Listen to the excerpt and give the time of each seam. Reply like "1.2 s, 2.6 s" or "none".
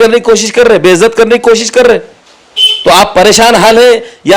none